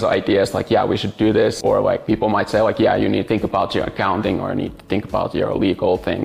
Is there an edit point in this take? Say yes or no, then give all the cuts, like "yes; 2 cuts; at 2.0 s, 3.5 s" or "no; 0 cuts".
no; 0 cuts